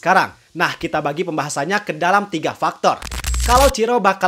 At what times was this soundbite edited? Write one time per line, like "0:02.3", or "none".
0:03.2